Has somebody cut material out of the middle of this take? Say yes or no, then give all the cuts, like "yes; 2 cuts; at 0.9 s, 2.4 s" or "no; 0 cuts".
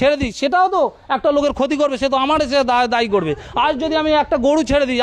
no; 0 cuts